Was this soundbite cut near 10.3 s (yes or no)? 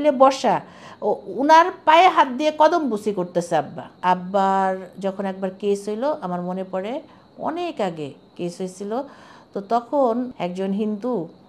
yes